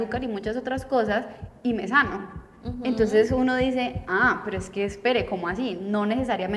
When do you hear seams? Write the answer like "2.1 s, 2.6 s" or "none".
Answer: none